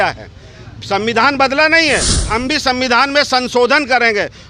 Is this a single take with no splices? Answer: no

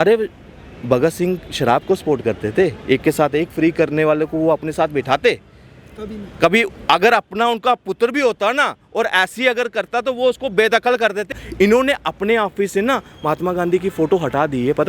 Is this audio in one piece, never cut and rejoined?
no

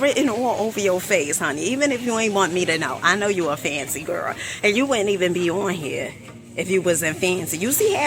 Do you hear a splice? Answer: no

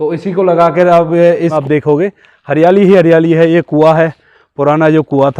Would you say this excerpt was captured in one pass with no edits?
no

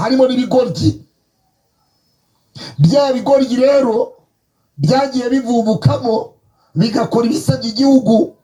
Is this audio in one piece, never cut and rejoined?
yes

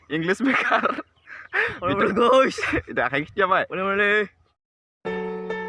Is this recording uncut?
no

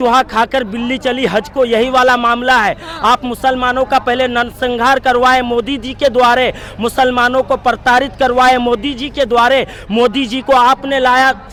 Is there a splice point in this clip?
no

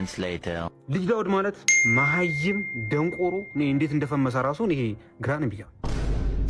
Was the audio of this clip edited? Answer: no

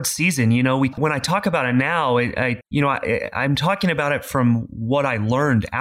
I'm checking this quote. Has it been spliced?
yes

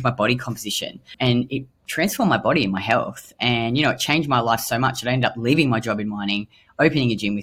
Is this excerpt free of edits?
no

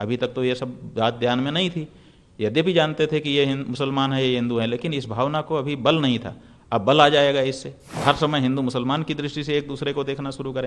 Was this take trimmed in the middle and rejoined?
yes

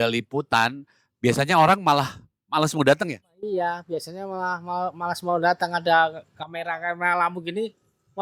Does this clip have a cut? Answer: no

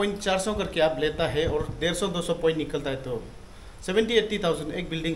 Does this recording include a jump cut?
no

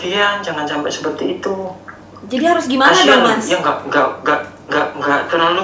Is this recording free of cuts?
yes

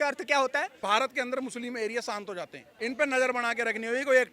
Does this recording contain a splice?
yes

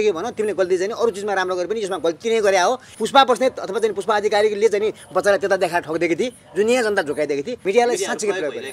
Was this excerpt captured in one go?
no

